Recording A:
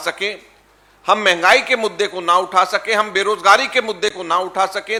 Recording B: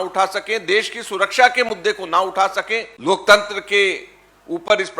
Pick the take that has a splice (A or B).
B